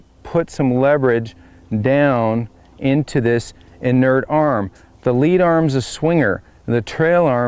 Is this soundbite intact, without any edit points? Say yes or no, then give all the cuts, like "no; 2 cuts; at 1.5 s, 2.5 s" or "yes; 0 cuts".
yes; 0 cuts